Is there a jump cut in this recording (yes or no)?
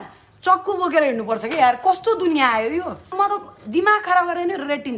yes